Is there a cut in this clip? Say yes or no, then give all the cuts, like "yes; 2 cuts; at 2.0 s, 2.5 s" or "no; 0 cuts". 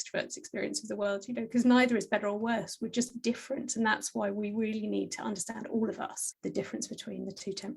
yes; 1 cut; at 6.2 s